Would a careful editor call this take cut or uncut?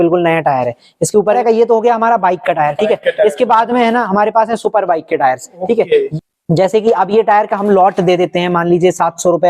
cut